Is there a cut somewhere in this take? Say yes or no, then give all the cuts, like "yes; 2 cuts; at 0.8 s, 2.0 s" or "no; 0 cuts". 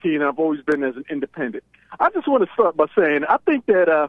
no; 0 cuts